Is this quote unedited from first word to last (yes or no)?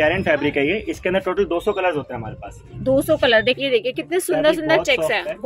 no